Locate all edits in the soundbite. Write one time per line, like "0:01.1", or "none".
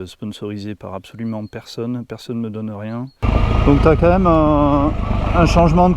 0:03.2